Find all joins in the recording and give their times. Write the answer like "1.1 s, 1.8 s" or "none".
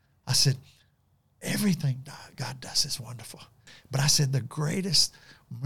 3.6 s

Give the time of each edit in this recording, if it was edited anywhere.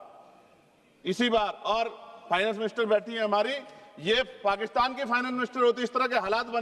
none

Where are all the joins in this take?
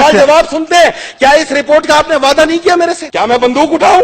3.1 s

